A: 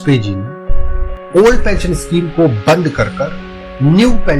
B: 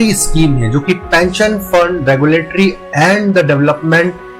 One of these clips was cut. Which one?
A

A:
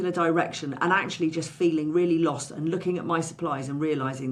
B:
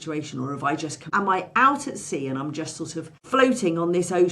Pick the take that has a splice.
B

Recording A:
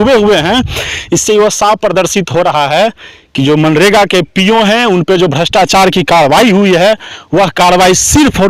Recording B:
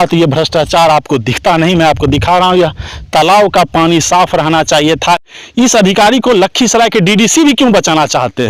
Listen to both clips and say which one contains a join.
B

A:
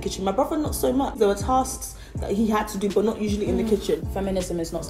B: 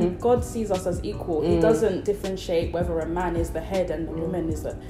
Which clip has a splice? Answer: A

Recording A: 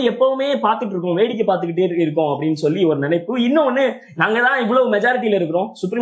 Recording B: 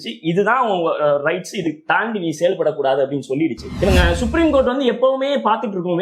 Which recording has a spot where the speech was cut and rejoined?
B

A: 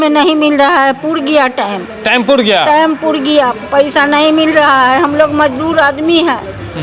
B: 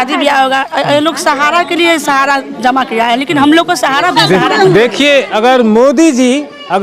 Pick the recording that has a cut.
B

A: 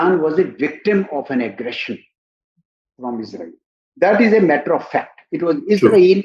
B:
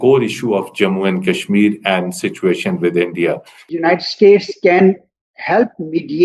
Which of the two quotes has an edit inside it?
B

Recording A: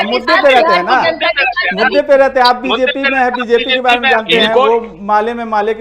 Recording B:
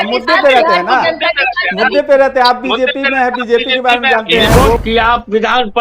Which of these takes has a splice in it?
B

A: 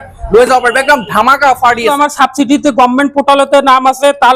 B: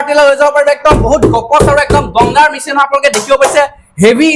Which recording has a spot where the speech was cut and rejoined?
A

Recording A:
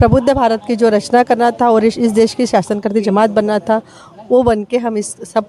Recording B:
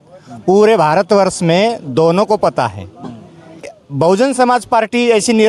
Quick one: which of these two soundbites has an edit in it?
B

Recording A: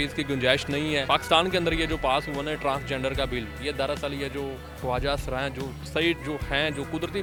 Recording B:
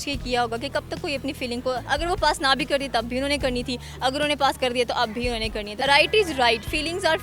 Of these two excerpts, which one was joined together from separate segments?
B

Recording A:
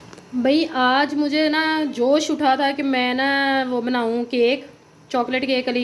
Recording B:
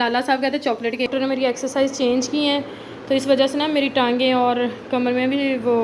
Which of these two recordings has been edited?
B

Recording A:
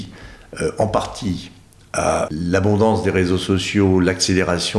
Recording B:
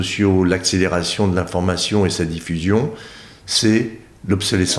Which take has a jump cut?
A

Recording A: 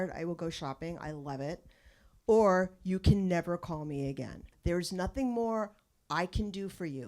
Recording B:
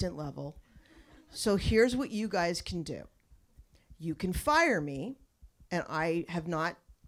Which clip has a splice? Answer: A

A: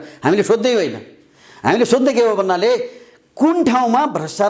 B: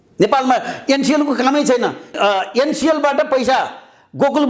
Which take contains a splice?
B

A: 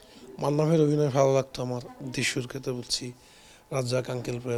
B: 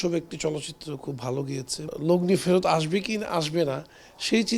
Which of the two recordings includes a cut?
B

